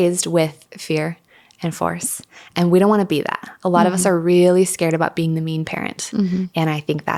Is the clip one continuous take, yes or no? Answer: yes